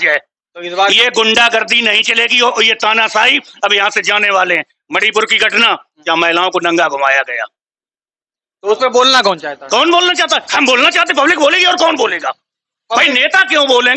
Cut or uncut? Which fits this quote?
uncut